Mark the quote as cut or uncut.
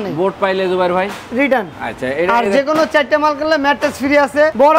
uncut